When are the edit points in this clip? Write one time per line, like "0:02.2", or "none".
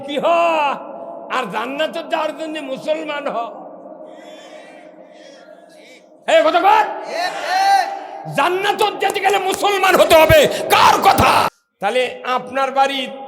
0:11.6